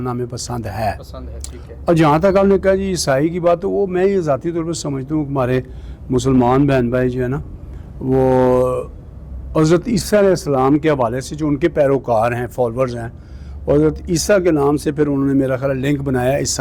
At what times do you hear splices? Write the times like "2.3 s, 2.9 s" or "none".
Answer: none